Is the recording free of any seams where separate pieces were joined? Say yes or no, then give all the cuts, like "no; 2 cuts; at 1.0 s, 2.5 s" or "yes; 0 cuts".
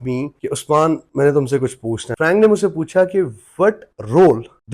no; 1 cut; at 2.1 s